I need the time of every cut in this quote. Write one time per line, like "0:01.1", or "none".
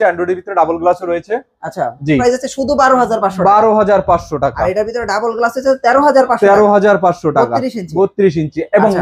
0:02.2